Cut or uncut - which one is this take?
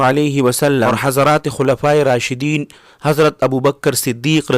cut